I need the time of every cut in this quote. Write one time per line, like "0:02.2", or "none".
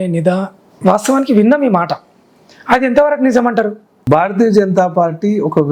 0:03.9

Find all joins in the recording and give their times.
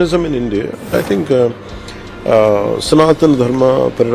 0:00.9

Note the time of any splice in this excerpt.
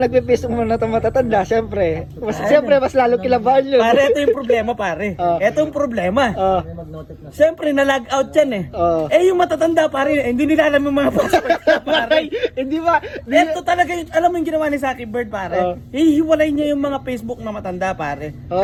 none

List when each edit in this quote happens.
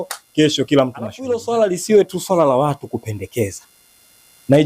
0:01.3

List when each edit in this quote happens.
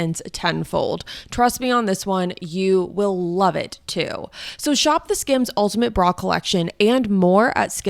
none

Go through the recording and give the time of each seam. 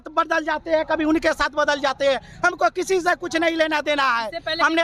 none

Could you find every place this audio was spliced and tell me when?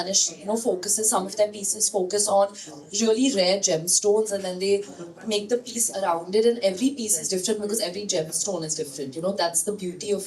none

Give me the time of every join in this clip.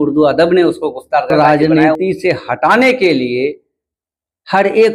0:01.3

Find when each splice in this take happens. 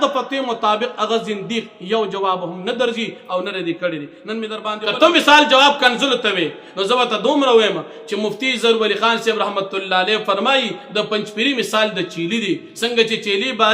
0:04.6

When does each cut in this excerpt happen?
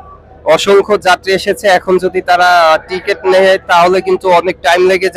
none

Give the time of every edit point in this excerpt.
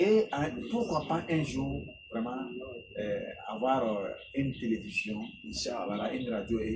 none

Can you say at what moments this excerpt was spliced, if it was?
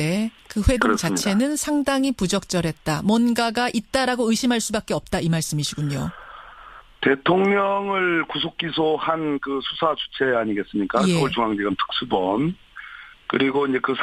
none

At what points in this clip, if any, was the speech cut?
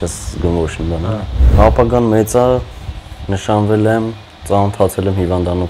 0:01.4

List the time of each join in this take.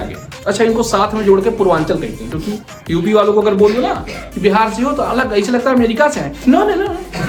none

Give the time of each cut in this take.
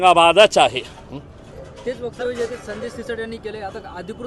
none

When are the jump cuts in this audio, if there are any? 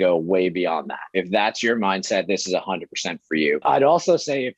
0:01.1
0:03.6

